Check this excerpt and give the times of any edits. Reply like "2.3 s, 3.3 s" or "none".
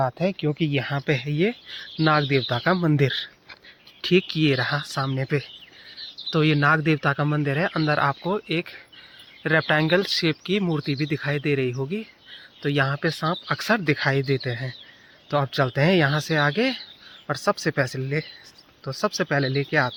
none